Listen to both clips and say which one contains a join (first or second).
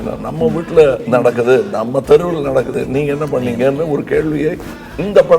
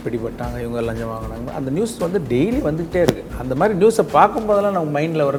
first